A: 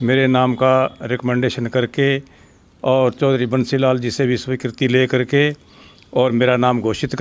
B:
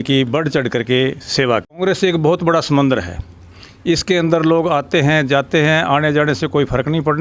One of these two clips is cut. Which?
B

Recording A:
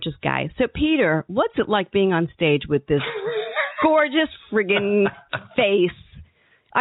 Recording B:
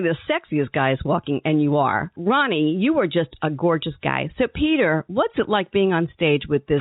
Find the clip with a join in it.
B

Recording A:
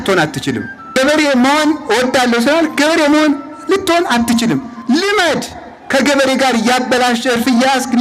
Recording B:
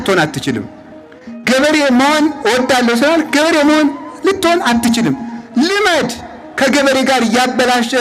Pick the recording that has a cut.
A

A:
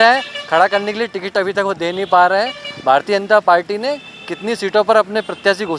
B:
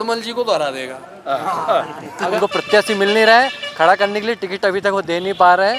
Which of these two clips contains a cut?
B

